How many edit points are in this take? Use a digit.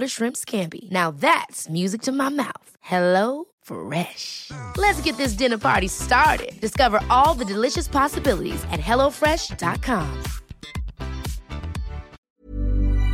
1